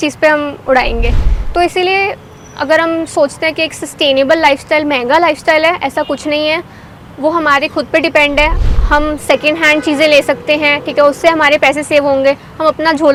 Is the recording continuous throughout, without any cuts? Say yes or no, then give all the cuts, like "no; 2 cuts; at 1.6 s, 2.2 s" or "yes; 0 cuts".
yes; 0 cuts